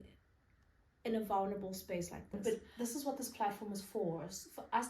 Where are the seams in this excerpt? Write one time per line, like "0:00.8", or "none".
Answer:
0:02.4

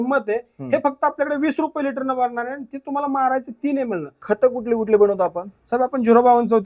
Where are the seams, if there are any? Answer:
0:04.1

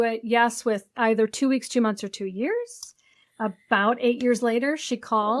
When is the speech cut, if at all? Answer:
none

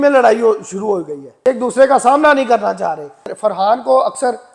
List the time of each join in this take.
0:01.2
0:03.3

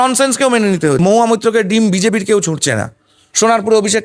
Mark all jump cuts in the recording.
0:01.0

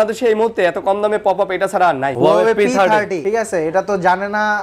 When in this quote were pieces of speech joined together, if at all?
0:02.1
0:03.2

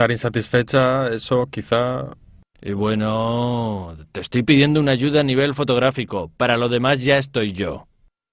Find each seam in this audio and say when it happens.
0:05.9

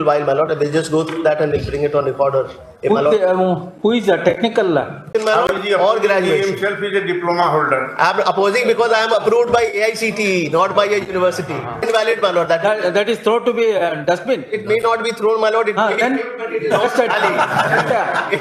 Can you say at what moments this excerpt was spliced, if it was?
0:05.1
0:11.8

